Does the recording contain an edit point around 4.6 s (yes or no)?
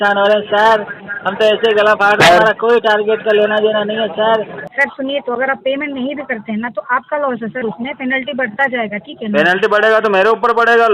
yes